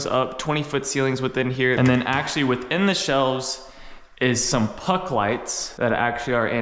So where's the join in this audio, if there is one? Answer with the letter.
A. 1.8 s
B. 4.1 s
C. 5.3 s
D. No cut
A